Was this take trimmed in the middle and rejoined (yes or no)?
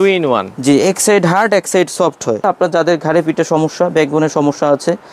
yes